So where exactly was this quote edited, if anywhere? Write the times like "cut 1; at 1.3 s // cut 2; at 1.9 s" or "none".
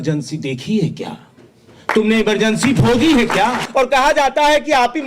cut 1; at 3.6 s